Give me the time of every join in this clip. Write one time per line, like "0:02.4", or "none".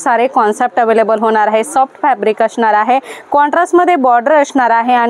none